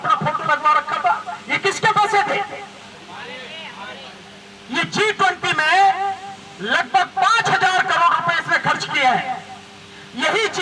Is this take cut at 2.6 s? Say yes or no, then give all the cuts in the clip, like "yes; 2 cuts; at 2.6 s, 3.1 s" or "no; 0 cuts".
no; 0 cuts